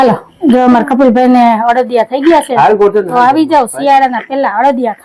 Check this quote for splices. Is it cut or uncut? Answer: uncut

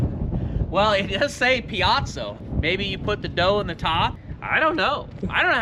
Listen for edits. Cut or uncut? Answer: cut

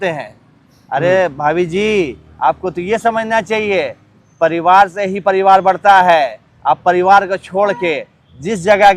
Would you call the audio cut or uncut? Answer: uncut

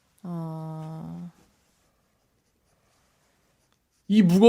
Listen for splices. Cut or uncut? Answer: uncut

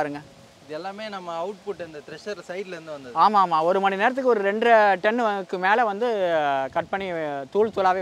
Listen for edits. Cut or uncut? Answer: uncut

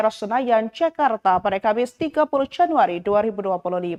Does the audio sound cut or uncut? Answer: uncut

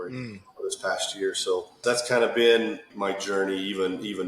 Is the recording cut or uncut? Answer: cut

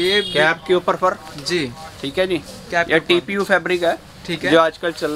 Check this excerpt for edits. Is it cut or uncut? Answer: uncut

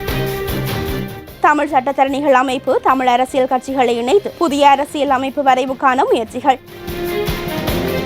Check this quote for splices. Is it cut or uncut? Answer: cut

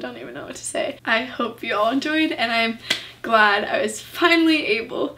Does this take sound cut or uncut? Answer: cut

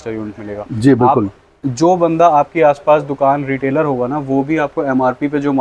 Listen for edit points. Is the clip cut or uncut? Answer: uncut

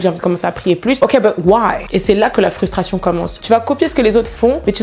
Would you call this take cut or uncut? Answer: cut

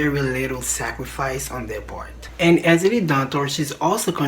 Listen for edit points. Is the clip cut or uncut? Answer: cut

